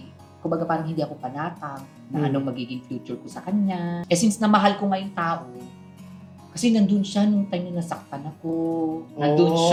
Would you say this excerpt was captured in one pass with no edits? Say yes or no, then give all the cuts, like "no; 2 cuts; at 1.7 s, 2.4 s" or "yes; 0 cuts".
yes; 0 cuts